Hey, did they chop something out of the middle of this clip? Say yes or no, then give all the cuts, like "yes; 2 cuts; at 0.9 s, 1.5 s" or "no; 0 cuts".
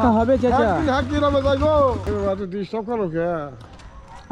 yes; 1 cut; at 2.0 s